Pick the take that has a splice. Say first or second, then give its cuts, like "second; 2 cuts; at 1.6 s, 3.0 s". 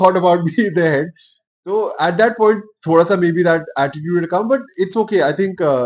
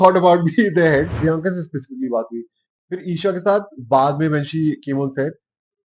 second; 1 cut; at 1.1 s